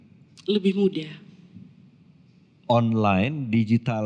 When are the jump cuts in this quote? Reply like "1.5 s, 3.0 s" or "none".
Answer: none